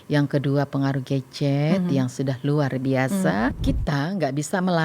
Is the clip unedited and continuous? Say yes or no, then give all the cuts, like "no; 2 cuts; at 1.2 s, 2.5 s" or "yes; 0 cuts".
no; 1 cut; at 3.6 s